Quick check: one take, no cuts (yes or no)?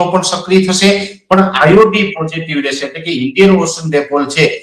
yes